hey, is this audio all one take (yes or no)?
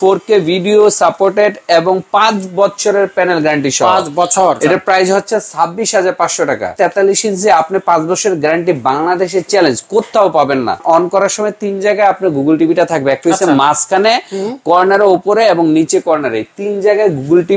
no